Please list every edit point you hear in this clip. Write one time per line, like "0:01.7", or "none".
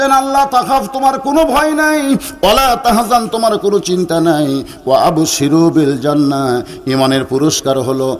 none